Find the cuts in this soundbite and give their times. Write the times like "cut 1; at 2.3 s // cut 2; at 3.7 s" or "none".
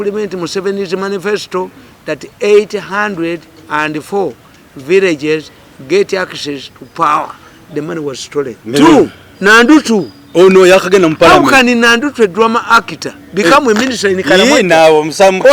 cut 1; at 8.6 s